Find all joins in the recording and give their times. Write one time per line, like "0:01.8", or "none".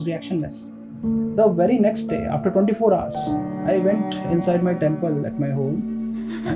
none